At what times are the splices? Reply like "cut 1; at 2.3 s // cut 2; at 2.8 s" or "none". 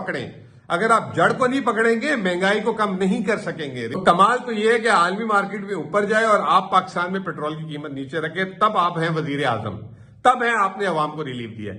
cut 1; at 4.0 s